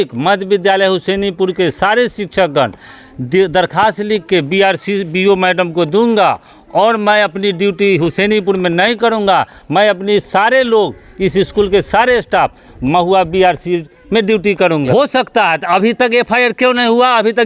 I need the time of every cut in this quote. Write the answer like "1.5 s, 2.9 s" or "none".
14.9 s